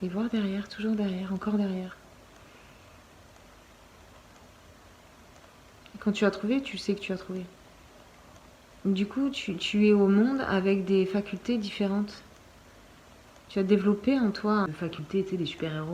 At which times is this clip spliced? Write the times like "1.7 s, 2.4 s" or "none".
14.7 s